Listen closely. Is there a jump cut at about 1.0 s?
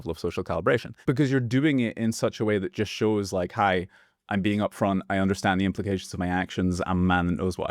yes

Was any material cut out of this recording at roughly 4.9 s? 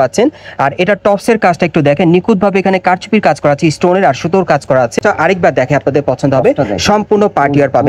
yes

